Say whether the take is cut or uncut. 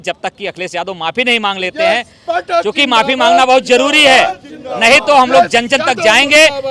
uncut